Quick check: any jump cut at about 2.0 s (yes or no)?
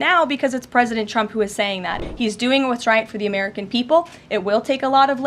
yes